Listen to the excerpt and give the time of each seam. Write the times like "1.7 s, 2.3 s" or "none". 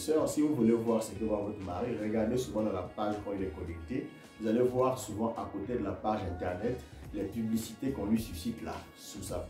none